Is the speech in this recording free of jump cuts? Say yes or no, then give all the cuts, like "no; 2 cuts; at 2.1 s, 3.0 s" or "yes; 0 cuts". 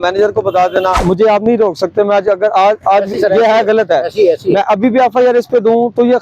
no; 1 cut; at 1.0 s